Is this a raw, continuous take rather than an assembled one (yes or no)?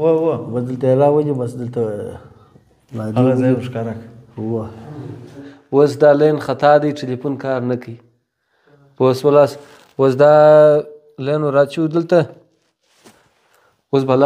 no